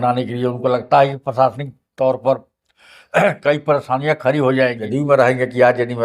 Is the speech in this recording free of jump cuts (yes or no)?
no